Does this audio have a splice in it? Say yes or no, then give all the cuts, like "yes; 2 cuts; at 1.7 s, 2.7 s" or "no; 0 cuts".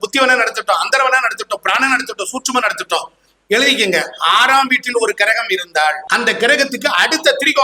yes; 1 cut; at 6.0 s